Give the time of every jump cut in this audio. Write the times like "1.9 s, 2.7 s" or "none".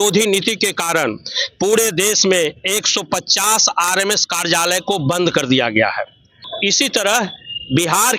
6.5 s